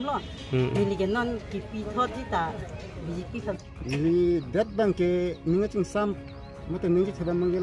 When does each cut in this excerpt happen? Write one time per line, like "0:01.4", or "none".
0:03.6